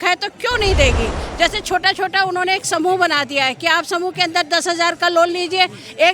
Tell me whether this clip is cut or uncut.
cut